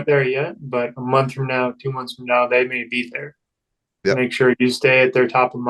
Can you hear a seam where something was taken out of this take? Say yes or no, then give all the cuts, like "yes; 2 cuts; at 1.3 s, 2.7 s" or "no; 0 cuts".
no; 0 cuts